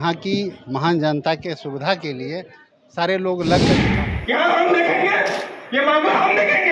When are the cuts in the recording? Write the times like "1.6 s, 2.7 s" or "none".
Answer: 3.9 s